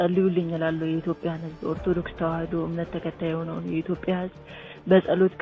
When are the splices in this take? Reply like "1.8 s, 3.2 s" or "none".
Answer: none